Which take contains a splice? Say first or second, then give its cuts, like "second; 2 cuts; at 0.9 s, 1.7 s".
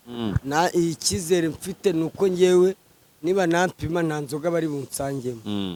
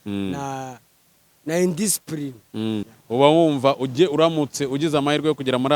second; 1 cut; at 2.9 s